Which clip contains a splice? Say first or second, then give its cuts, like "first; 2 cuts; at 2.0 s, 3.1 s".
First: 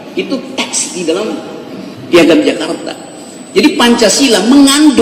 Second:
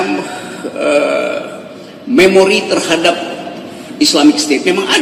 first; 1 cut; at 1.9 s